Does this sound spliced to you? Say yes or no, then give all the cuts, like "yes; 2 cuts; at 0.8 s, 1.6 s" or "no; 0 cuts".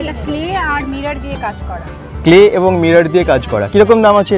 no; 0 cuts